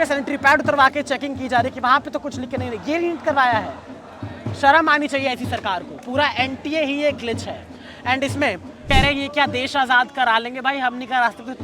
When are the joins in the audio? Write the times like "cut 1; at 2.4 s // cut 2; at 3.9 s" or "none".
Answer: cut 1; at 8.8 s